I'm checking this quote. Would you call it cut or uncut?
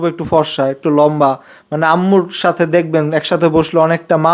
uncut